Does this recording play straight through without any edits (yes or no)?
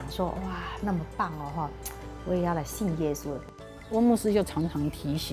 no